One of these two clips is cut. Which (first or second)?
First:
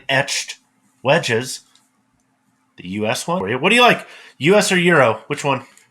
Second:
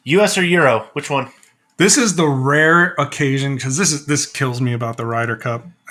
first